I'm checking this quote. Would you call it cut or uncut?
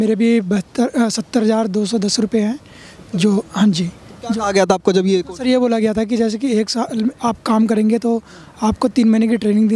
uncut